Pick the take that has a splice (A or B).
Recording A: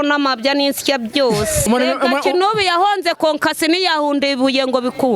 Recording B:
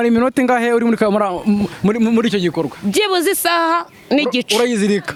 A